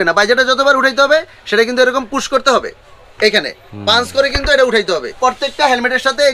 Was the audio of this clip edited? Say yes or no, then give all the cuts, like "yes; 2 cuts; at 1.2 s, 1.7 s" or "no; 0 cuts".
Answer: yes; 1 cut; at 5.1 s